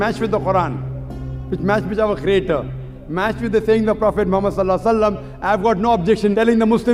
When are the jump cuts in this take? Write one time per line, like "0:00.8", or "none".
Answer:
none